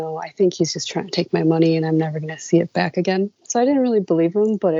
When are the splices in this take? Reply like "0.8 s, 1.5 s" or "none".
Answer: 3.4 s